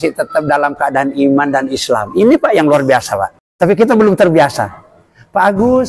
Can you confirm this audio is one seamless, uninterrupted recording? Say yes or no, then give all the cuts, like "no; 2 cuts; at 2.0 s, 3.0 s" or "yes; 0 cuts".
no; 1 cut; at 3.4 s